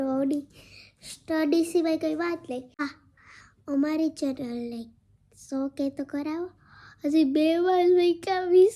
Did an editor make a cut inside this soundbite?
yes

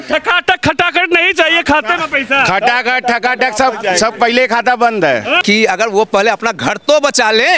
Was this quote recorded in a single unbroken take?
no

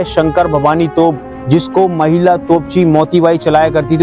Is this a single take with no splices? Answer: yes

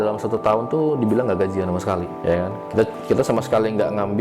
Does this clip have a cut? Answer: yes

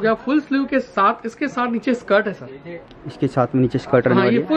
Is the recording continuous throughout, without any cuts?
yes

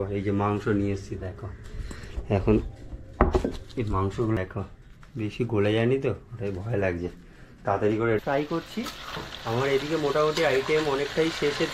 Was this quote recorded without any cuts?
no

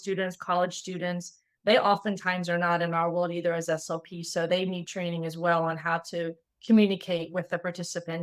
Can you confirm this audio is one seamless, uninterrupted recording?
yes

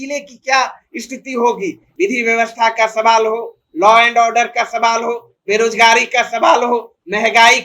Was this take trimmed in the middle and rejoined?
yes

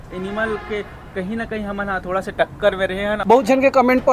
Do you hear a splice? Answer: yes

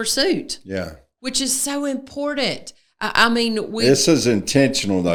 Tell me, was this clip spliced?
no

